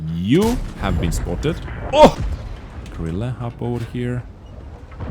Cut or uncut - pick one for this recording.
cut